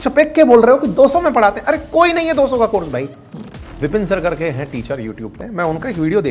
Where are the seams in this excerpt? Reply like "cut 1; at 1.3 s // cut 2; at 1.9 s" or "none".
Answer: cut 1; at 3.7 s // cut 2; at 5.4 s